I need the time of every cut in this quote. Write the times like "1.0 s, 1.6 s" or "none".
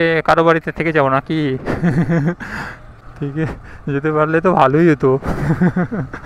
none